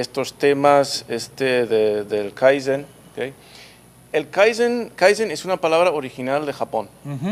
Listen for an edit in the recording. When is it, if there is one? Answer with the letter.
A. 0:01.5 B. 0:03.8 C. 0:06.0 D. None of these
A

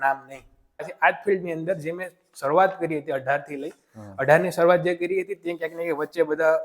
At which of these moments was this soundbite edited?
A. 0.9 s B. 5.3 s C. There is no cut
A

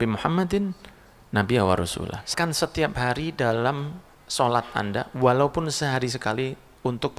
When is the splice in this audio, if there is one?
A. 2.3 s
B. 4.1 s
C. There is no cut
A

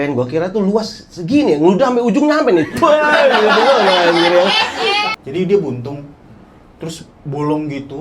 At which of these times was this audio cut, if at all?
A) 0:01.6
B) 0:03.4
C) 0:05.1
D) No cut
C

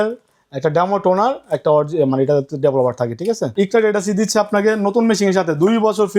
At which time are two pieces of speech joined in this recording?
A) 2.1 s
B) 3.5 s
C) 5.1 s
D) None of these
B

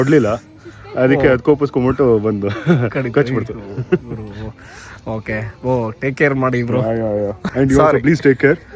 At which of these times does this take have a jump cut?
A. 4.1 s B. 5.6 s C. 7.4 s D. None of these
C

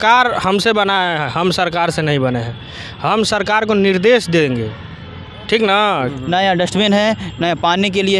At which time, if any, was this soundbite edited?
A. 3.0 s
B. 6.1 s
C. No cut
B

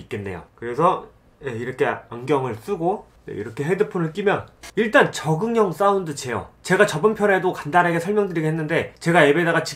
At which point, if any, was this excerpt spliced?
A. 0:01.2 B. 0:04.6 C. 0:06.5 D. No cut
B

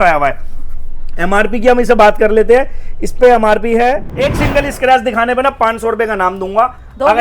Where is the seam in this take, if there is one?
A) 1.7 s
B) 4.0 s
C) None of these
B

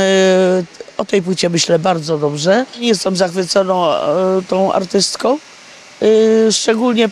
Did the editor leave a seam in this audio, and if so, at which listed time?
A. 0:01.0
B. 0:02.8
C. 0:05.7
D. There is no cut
B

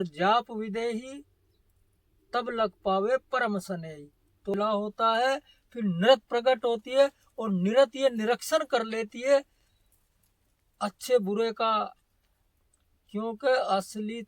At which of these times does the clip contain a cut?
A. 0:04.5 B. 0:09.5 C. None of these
A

